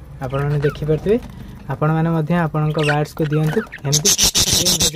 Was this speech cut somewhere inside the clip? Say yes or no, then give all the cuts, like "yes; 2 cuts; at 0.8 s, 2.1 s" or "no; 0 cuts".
no; 0 cuts